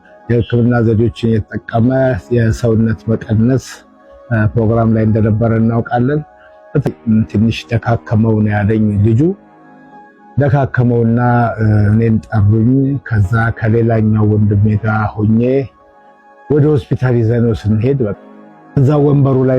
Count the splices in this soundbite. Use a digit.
0